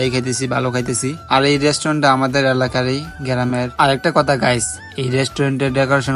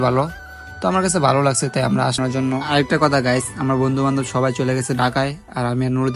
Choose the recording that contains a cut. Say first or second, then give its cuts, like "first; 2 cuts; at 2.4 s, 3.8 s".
second; 1 cut; at 2.2 s